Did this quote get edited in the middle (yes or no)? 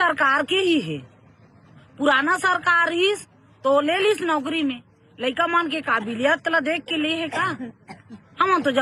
no